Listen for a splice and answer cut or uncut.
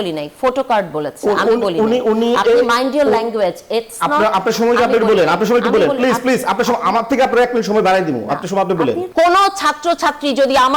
cut